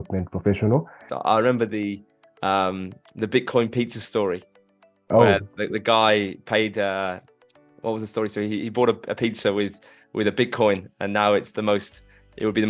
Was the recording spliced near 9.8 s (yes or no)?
no